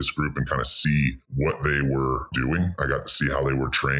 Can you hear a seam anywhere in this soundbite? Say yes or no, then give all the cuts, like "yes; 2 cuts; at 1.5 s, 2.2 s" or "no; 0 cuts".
yes; 2 cuts; at 1.2 s, 2.3 s